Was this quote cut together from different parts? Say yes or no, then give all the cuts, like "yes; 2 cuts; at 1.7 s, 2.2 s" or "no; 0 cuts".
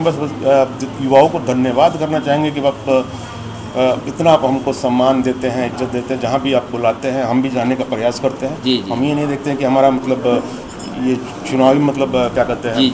no; 0 cuts